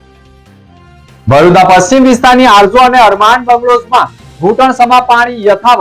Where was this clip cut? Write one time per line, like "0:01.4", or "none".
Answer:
0:01.0